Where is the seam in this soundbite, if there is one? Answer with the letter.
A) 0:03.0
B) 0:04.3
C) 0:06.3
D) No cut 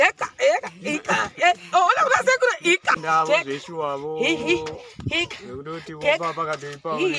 A